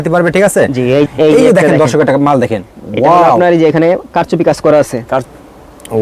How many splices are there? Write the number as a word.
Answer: two